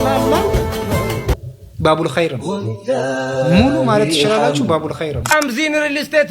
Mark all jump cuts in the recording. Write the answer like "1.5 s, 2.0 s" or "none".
5.2 s

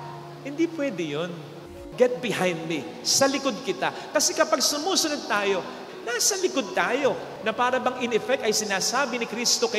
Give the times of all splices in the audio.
1.7 s, 5.8 s, 7.3 s

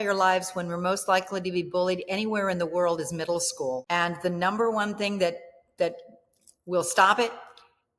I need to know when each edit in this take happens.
3.8 s

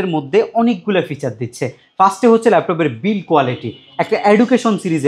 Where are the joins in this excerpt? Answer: none

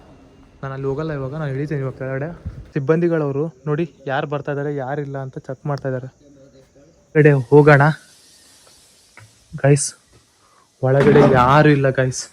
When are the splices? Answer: 2.5 s, 7.2 s

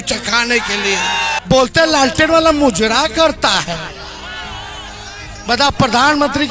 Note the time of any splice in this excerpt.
1.4 s

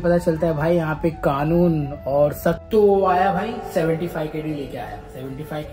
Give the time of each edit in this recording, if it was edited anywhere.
2.6 s

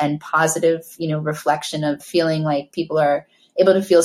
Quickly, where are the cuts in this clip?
2.0 s

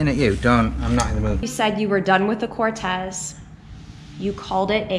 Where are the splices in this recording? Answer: 1.5 s

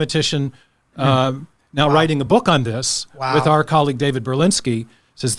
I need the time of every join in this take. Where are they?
none

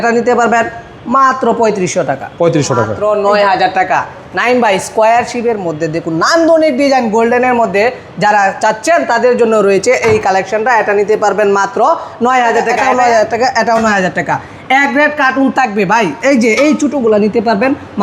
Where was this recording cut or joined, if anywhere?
2.9 s, 12.8 s

